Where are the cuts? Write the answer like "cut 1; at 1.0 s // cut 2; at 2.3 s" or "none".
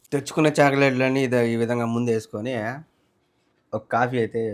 none